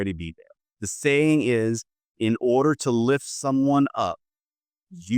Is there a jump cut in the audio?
no; 0 cuts

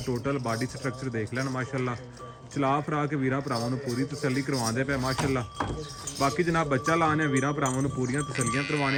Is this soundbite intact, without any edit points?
yes; 0 cuts

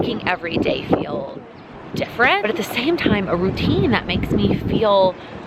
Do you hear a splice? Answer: yes; 1 cut; at 2.4 s

